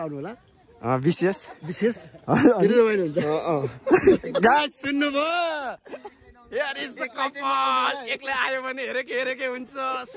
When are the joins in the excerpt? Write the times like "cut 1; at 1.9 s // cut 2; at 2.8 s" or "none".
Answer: none